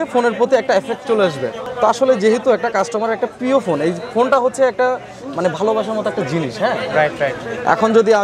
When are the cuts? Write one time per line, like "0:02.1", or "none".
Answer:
none